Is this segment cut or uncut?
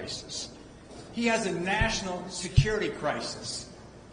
cut